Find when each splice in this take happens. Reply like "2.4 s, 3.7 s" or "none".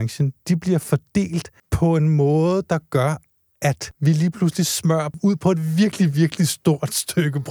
1.6 s, 3.9 s, 5.1 s